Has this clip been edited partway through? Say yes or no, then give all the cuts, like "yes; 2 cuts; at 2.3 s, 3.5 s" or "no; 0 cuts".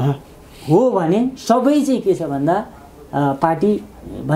no; 0 cuts